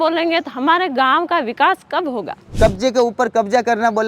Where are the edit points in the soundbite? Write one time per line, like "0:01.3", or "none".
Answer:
0:02.5